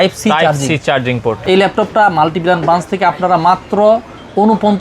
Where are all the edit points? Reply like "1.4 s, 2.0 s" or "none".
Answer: 1.4 s